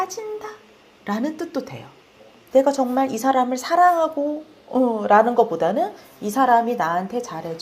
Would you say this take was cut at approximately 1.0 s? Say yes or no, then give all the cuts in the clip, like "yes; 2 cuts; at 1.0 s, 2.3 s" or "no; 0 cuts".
no; 1 cut; at 2.4 s